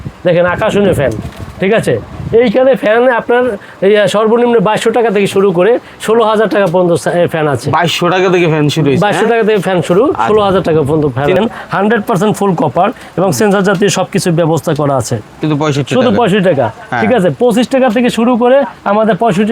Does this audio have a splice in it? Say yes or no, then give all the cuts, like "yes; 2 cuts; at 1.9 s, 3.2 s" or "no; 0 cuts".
yes; 2 cuts; at 11.4 s, 15.3 s